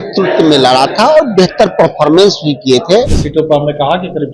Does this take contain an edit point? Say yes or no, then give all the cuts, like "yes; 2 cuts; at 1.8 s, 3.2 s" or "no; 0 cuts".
yes; 1 cut; at 3.2 s